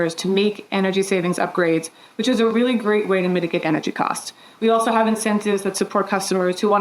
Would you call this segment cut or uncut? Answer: cut